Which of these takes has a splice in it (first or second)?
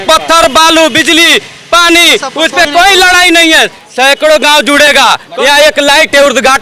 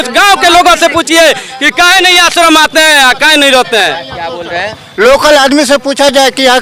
first